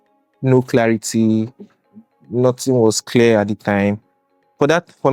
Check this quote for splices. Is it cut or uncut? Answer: uncut